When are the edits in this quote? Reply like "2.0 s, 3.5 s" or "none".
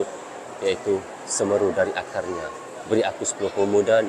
none